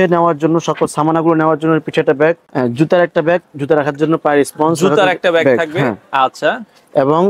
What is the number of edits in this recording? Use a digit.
1